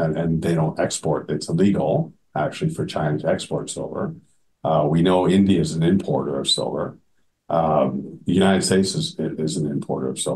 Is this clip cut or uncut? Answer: uncut